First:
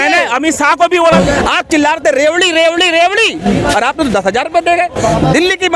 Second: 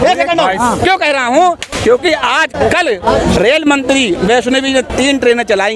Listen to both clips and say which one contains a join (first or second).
first